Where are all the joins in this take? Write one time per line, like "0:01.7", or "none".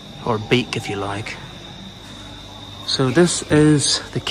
0:02.1